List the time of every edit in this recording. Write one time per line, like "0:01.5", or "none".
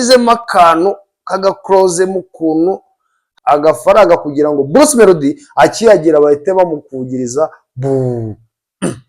0:03.2